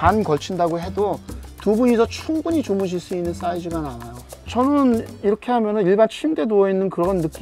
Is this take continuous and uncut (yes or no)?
yes